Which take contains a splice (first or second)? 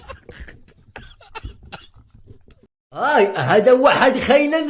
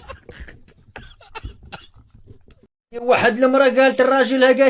first